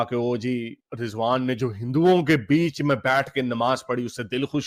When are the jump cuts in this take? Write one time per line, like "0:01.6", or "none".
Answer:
none